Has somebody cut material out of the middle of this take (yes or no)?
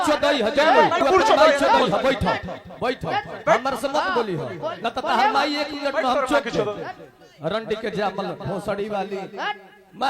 yes